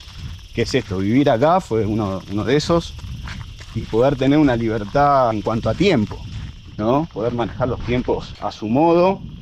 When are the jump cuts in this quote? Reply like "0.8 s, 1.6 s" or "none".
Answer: none